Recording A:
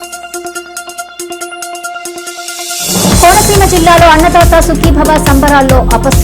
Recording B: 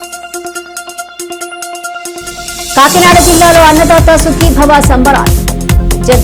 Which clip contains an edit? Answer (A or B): B